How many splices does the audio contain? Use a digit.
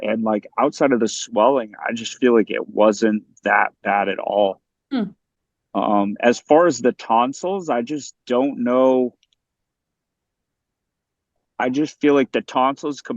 0